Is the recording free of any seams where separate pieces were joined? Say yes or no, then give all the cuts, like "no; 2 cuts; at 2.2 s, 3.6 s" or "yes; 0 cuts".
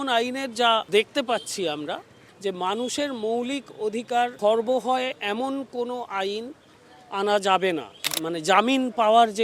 no; 4 cuts; at 0.9 s, 2.1 s, 4.3 s, 8.0 s